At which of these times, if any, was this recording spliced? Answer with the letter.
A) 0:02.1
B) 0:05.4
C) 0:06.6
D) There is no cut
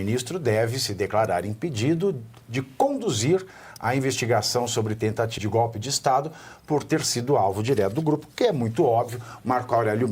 B